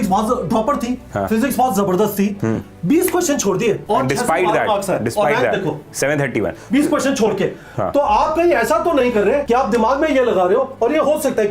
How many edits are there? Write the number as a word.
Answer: two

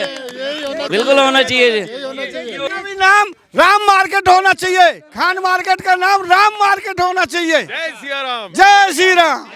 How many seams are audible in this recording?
one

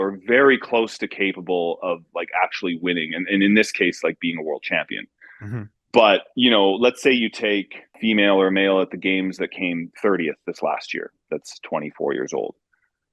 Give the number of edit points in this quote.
zero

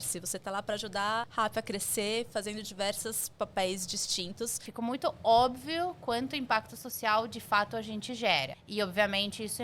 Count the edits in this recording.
three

